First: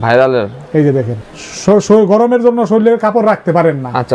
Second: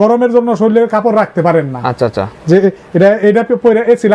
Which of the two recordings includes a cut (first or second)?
first